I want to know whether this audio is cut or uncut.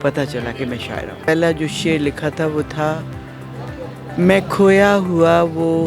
cut